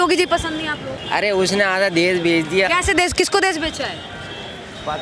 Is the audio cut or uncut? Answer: cut